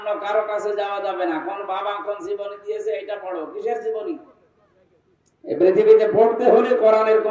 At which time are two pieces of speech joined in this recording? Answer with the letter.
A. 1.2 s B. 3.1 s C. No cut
C